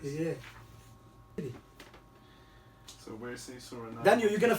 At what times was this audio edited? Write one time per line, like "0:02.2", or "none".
0:01.4